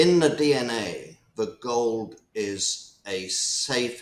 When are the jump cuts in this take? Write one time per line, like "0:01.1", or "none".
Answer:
none